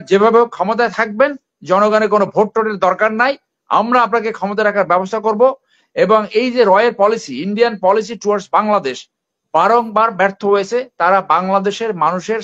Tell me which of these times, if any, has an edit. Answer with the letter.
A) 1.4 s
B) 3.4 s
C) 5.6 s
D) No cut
D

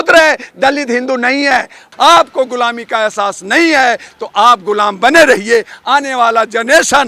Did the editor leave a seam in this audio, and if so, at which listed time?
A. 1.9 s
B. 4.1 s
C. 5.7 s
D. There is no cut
A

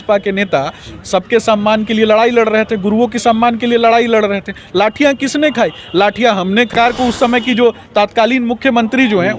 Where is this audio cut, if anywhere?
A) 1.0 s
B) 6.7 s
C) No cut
B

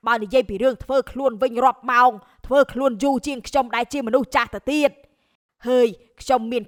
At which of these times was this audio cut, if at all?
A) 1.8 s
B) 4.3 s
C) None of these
C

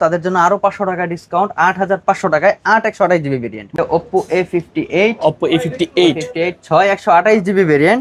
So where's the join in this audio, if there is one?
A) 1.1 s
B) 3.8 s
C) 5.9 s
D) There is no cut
B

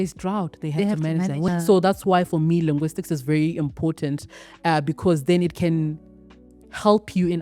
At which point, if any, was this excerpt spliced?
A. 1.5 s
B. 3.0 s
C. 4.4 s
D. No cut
A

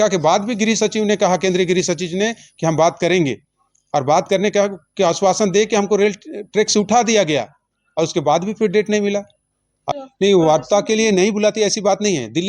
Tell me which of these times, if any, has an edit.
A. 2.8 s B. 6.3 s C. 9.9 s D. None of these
C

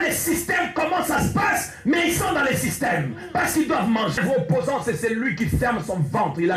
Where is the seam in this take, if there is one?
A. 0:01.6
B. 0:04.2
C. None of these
B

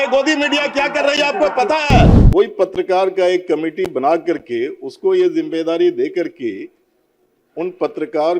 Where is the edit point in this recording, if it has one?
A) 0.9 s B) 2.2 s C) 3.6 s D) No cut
B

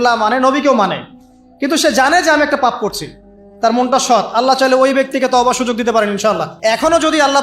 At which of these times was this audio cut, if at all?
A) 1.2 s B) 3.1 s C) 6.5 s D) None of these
C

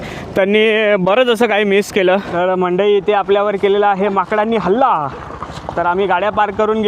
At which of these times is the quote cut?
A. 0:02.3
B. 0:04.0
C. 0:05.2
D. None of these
A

